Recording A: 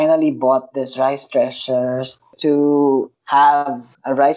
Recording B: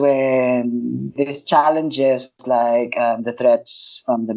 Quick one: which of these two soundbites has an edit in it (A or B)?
A